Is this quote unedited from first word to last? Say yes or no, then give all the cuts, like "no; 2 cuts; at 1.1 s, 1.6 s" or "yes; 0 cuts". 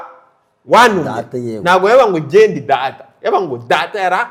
yes; 0 cuts